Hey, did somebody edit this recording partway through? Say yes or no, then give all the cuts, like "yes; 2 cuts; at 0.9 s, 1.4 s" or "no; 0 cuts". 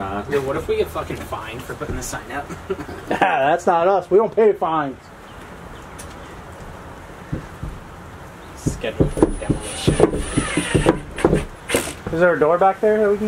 no; 0 cuts